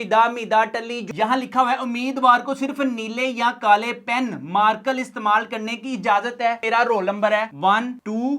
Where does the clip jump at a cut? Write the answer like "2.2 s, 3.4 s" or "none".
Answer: 1.0 s, 6.6 s